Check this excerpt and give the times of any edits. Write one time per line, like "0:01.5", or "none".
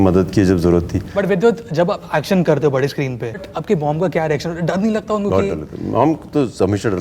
0:01.1
0:03.5